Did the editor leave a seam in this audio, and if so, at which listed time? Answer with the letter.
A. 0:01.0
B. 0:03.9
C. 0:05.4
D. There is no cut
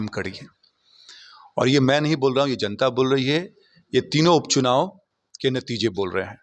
D